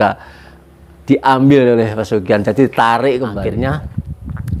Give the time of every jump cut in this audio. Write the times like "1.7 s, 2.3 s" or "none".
3.4 s